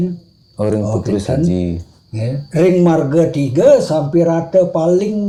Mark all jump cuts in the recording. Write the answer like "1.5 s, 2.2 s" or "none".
none

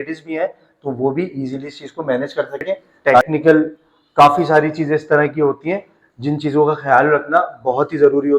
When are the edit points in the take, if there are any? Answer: 3.2 s

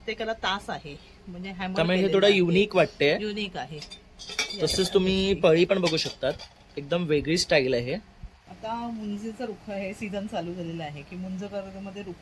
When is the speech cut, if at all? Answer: 8.4 s

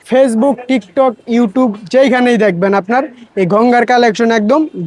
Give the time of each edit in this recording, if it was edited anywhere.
none

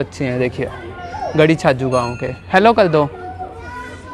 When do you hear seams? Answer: none

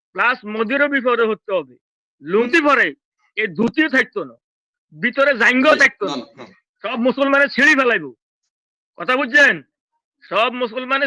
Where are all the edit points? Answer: 2.5 s

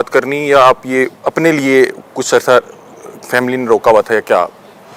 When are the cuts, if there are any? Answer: none

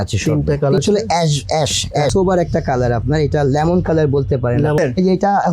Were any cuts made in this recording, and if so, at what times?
0.8 s, 2.1 s, 4.8 s

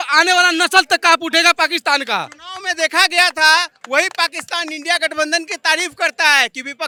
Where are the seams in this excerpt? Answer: none

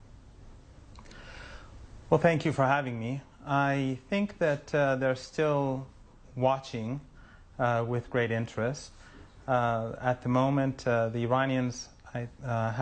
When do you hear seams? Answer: 7.7 s

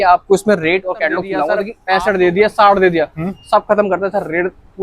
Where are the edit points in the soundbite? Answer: 1.7 s

